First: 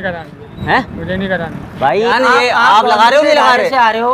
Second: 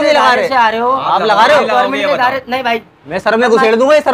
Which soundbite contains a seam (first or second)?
first